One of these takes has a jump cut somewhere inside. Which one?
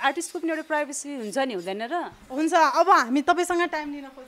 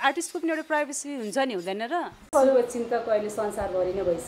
second; 1 cut; at 2.3 s

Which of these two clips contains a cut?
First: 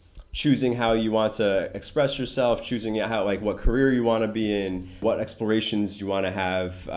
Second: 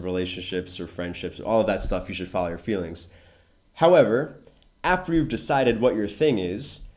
first; 1 cut; at 5.0 s

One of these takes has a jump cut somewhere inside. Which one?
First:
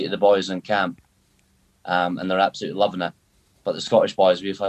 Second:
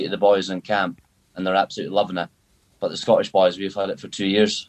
second; 1 cut; at 1.3 s

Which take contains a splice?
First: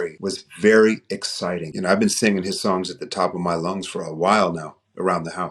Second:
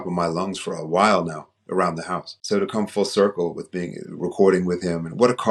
first; 1 cut; at 1.7 s

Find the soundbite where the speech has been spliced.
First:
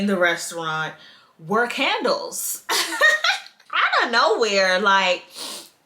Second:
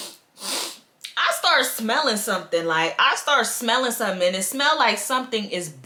first; 1 cut; at 3.6 s

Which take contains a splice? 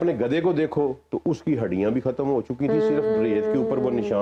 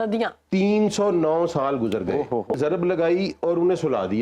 second; 1 cut; at 2.5 s

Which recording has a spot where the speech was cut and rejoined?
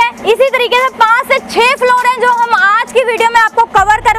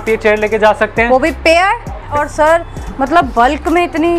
second; 1 cut; at 2.1 s

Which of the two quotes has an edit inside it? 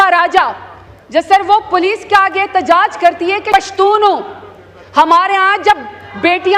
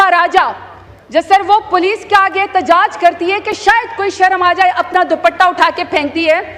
first; 1 cut; at 3.5 s

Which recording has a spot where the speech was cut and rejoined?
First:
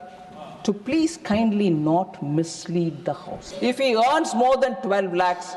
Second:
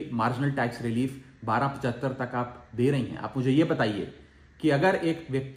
first; 1 cut; at 3.4 s

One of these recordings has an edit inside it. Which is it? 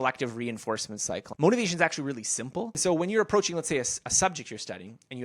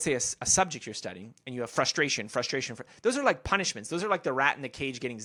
first; 2 cuts; at 1.2 s, 2.7 s

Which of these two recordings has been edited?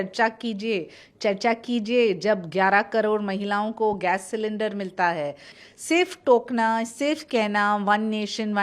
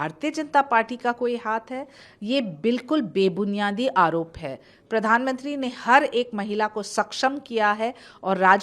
first; 1 cut; at 5.5 s

